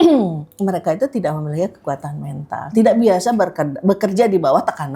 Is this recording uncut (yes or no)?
yes